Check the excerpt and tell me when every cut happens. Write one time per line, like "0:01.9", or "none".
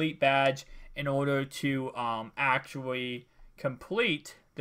0:03.6